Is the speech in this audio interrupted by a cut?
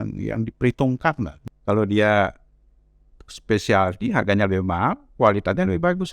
yes; 1 cut; at 1.3 s

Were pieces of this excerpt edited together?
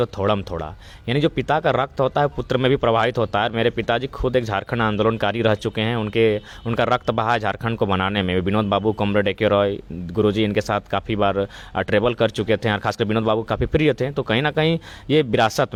no; 0 cuts

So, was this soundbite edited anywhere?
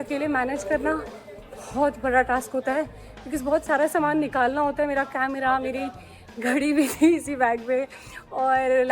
no; 0 cuts

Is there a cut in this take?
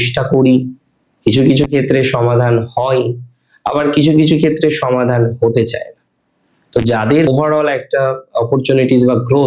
yes; 1 cut; at 7.3 s

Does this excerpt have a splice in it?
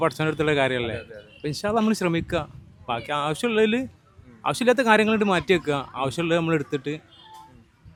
no; 0 cuts

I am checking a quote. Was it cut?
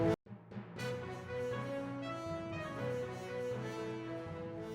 yes; 1 cut; at 2.5 s

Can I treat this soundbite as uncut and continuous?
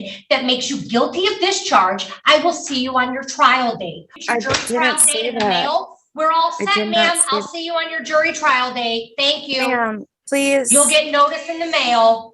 no; 1 cut; at 4.1 s

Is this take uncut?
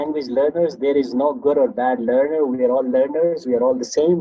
yes; 0 cuts

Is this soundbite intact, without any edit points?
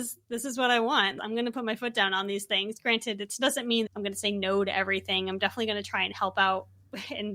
no; 2 cuts; at 1.2 s, 3.9 s

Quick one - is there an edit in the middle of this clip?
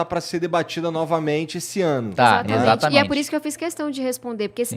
no; 0 cuts

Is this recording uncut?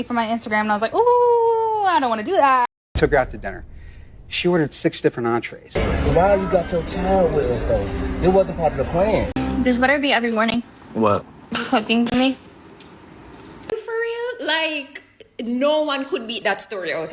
no; 4 cuts; at 2.8 s, 5.6 s, 9.3 s, 13.7 s

